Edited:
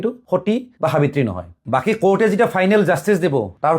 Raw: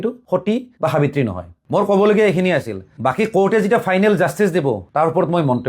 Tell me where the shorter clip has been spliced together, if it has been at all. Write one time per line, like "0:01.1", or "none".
0:01.5